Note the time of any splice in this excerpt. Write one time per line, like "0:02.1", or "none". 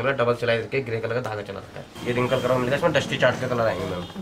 0:01.9